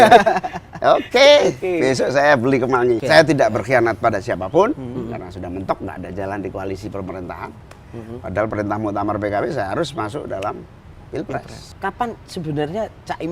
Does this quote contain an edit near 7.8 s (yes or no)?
no